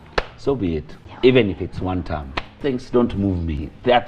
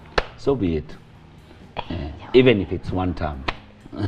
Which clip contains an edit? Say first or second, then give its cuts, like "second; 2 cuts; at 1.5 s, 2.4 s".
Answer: first; 2 cuts; at 1.0 s, 2.6 s